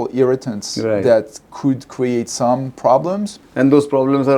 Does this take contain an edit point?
yes; 1 cut; at 3.3 s

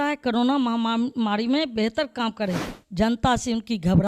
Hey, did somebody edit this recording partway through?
yes; 1 cut; at 2.8 s

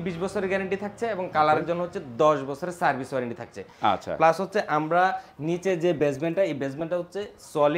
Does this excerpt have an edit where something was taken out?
no; 0 cuts

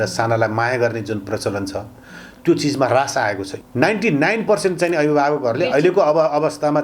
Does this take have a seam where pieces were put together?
yes; 1 cut; at 3.5 s

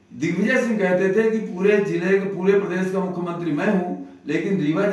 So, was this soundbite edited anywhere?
no; 0 cuts

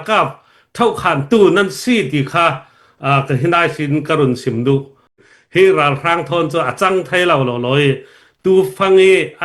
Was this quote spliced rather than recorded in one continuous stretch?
yes; 1 cut; at 5.2 s

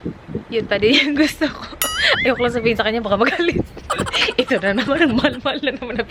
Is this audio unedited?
yes; 0 cuts

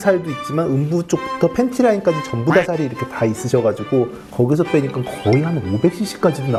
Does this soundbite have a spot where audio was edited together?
no; 0 cuts

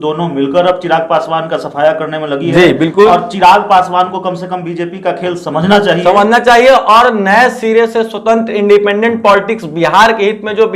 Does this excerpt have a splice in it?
no; 0 cuts

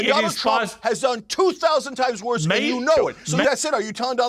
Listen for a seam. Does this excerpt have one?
yes; 1 cut; at 3.2 s

